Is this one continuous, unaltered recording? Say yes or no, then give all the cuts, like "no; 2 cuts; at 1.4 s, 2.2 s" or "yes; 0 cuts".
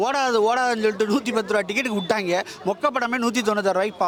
yes; 0 cuts